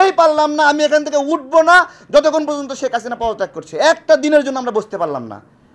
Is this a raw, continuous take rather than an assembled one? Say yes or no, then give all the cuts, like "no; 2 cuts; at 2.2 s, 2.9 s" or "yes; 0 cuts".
yes; 0 cuts